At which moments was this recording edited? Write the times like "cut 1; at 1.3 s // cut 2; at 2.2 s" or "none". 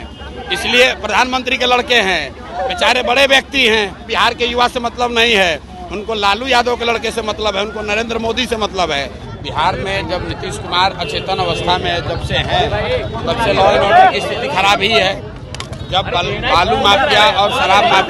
cut 1; at 2.4 s // cut 2; at 4.1 s // cut 3; at 9.2 s